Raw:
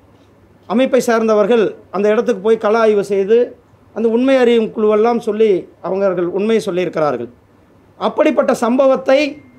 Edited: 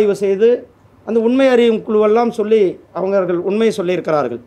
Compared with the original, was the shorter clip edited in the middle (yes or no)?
no